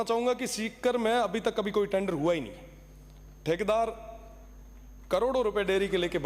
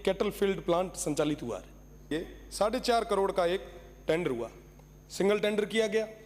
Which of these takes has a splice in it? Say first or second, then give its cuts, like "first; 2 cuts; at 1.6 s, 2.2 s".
second; 1 cut; at 2.1 s